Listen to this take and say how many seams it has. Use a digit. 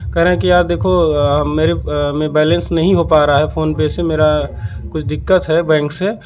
0